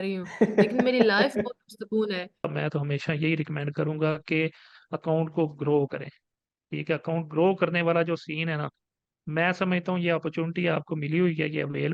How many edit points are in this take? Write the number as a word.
one